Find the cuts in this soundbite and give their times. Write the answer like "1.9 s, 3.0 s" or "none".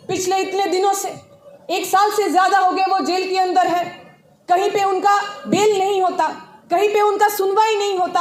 none